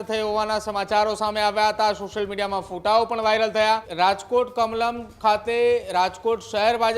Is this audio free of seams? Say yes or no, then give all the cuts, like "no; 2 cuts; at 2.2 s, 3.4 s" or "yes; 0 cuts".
no; 1 cut; at 3.9 s